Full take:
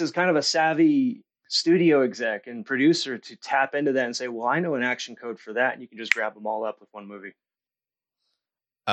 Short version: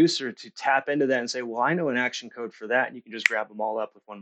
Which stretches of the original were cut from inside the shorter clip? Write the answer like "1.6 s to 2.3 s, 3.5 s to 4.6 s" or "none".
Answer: none